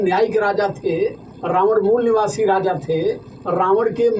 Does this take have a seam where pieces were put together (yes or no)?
no